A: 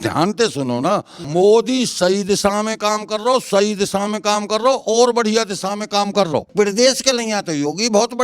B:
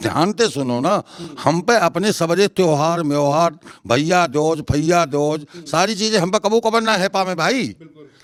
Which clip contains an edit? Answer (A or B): A